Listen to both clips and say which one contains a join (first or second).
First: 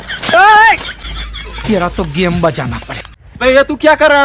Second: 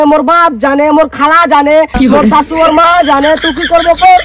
first